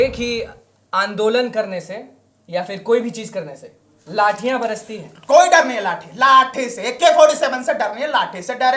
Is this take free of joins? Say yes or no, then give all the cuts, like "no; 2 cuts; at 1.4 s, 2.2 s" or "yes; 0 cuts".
yes; 0 cuts